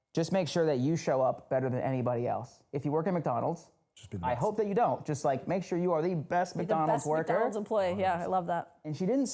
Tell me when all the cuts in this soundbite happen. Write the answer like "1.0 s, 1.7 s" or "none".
2.6 s